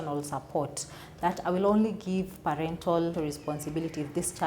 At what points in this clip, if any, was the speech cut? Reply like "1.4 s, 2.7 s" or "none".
3.1 s